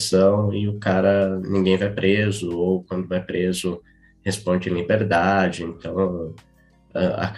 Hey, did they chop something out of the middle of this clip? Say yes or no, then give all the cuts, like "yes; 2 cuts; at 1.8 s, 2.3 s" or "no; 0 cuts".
no; 0 cuts